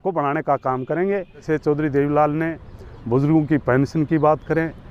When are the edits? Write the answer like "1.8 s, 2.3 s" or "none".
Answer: 1.5 s